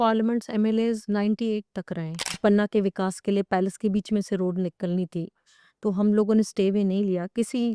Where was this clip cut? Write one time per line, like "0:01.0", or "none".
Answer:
0:02.4

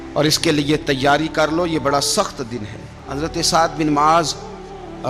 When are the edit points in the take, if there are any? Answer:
0:03.0

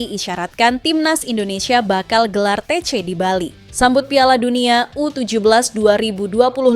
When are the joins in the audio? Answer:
0:03.6

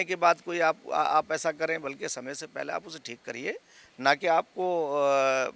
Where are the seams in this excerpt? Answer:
0:03.8

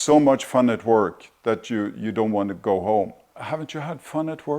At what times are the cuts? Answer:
0:03.2

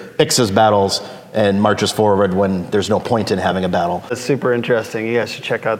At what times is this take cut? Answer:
0:04.2

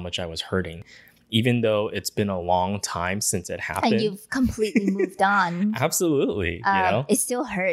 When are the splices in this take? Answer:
0:00.9

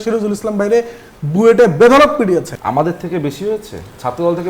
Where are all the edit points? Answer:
0:02.6

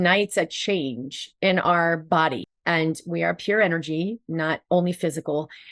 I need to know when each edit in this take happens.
0:02.5

